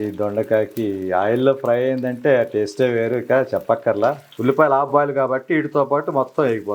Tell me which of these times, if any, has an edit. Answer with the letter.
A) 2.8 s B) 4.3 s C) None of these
B